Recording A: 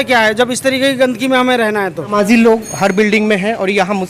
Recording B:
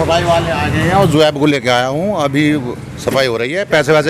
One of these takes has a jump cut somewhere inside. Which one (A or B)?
A